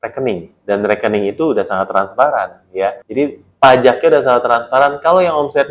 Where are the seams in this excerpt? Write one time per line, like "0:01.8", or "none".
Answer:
0:03.0